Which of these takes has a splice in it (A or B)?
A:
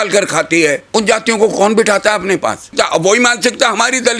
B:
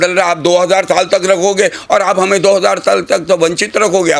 A